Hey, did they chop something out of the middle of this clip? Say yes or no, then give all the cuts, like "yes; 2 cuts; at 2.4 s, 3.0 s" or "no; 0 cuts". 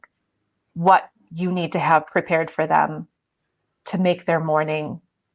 no; 0 cuts